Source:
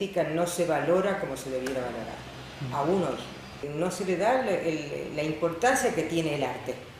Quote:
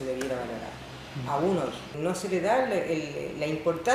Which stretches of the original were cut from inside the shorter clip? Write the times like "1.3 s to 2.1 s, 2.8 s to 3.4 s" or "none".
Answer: 3.3 s to 3.6 s